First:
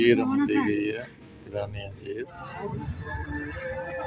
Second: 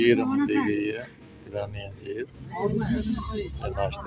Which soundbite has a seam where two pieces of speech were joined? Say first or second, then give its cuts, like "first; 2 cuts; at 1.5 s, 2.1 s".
first; 1 cut; at 2.7 s